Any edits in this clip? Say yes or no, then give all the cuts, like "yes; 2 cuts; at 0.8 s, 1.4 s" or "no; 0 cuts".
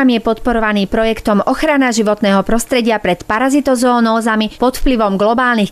no; 0 cuts